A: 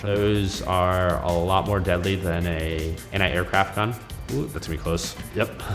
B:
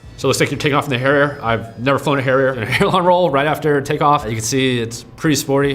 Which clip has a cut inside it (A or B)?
B